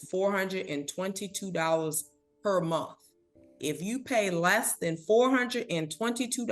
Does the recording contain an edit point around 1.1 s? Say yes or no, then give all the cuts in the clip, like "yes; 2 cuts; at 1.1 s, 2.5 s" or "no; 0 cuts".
no; 1 cut; at 4.7 s